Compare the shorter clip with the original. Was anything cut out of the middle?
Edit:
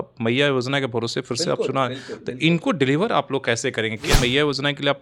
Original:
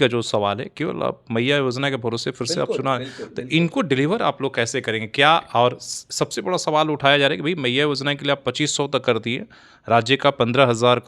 yes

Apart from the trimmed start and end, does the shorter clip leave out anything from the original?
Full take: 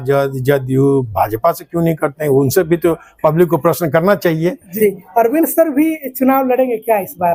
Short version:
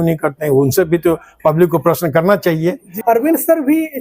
yes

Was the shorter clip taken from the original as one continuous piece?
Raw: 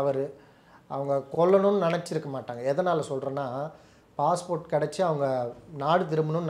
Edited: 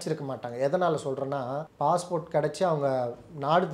no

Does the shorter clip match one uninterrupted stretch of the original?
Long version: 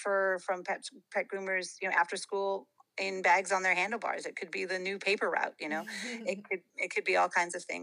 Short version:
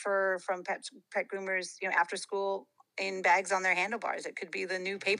yes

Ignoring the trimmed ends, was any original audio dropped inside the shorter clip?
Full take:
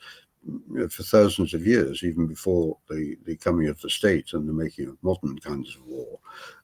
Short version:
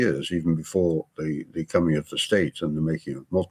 no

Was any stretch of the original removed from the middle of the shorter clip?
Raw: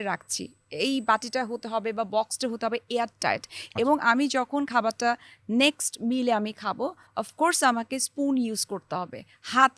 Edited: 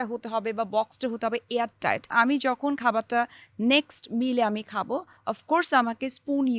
yes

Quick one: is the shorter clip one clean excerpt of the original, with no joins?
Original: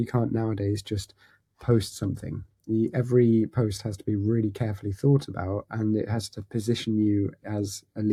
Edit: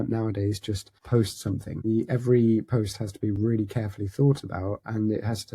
no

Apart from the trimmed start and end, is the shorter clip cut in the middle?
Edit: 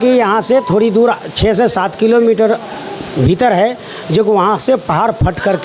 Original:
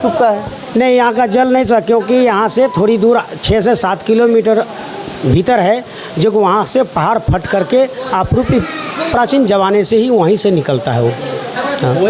no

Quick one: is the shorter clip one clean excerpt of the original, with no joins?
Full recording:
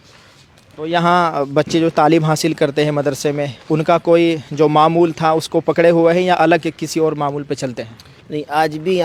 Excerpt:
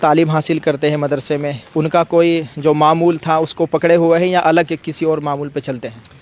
yes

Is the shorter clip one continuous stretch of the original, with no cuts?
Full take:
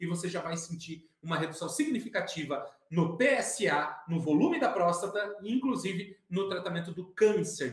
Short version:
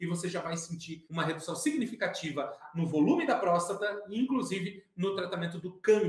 no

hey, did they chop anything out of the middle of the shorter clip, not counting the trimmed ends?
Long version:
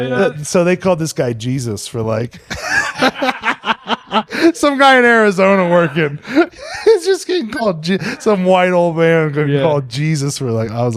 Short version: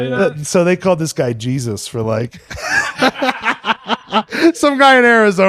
no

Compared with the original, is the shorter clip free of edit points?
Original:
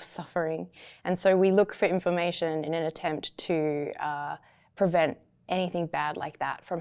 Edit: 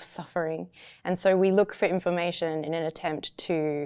yes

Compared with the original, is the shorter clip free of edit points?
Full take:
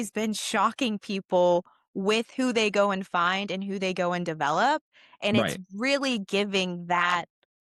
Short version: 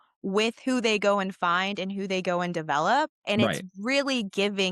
no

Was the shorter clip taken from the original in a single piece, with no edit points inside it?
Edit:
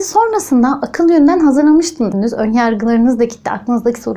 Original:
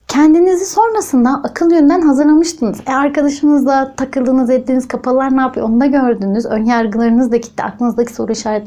no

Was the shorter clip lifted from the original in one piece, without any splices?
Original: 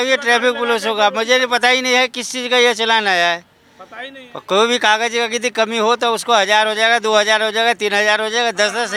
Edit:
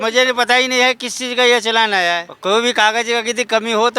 no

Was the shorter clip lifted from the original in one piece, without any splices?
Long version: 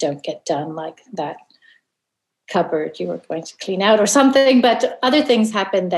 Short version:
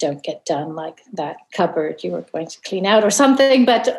no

